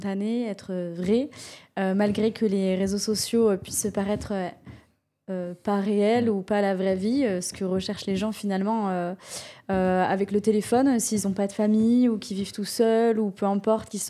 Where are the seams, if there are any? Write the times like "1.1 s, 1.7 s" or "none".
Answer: none